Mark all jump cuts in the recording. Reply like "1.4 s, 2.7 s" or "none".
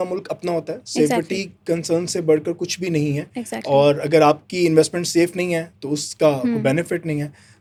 none